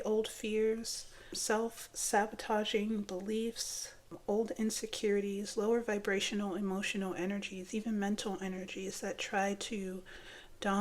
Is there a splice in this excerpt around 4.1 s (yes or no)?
yes